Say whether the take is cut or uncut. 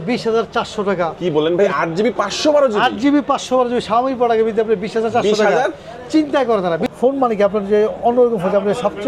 cut